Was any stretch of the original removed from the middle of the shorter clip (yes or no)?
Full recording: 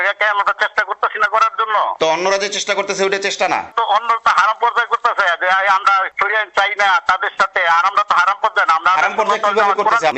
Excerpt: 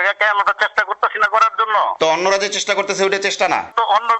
no